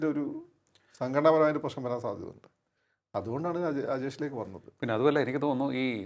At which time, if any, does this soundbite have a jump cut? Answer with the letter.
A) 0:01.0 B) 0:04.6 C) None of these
C